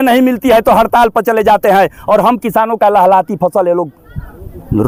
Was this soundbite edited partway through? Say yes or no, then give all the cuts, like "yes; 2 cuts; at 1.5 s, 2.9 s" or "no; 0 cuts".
no; 0 cuts